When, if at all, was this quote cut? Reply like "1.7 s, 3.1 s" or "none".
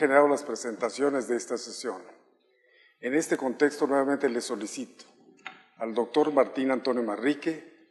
none

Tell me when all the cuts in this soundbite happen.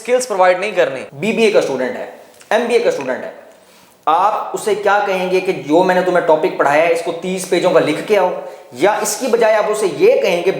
1.1 s

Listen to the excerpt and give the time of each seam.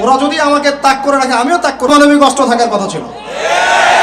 1.9 s

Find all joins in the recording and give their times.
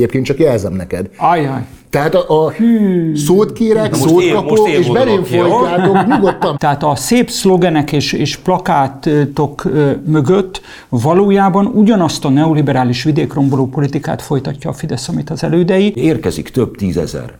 6.5 s, 16.0 s

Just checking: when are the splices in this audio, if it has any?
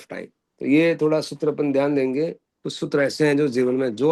none

